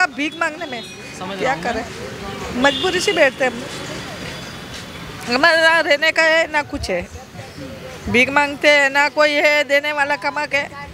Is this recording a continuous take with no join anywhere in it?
yes; 0 cuts

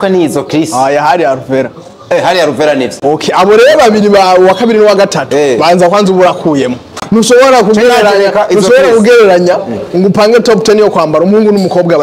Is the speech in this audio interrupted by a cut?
yes; 1 cut; at 7.0 s

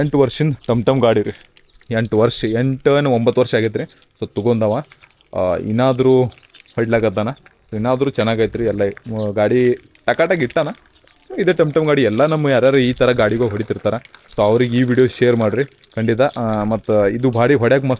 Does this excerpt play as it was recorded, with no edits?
yes; 0 cuts

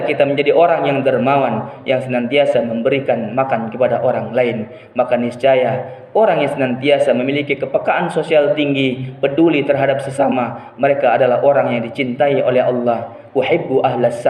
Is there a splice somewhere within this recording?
no; 0 cuts

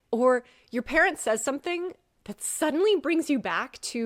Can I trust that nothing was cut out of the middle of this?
yes; 0 cuts

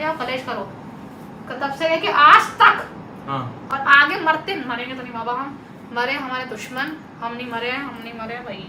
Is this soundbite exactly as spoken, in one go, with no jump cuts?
yes; 0 cuts

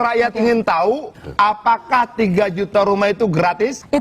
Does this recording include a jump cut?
yes; 1 cut; at 1.1 s

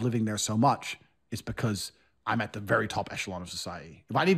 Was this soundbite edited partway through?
no; 0 cuts

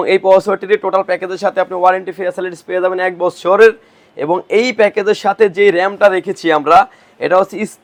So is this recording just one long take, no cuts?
yes; 0 cuts

